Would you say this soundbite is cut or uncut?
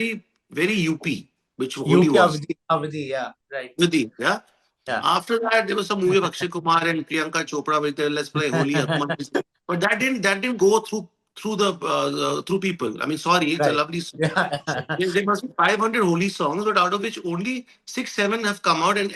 uncut